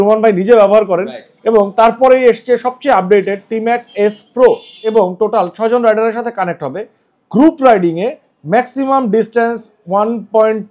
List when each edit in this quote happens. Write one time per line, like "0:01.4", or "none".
0:04.9